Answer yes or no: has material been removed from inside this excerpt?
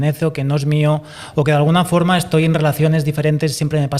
no